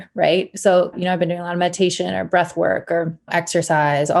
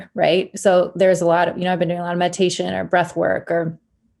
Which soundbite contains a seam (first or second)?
first